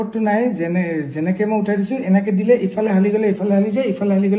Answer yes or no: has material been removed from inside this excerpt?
no